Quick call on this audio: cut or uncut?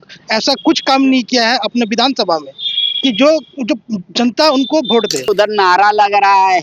cut